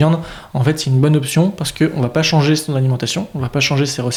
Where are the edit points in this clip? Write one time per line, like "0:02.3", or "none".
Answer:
none